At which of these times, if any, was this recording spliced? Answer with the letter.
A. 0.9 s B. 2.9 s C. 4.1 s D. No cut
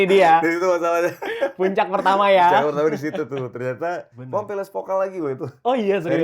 C